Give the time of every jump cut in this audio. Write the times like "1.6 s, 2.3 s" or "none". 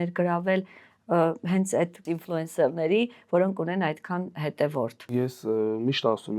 2.1 s, 5.1 s